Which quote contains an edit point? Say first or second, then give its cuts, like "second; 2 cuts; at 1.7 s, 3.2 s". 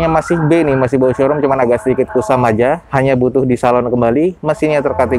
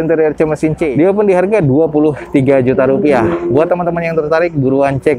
second; 1 cut; at 0.9 s